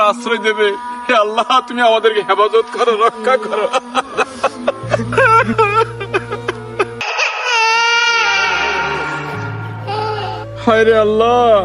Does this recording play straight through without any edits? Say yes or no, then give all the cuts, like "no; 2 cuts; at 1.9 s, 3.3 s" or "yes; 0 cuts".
no; 1 cut; at 7.0 s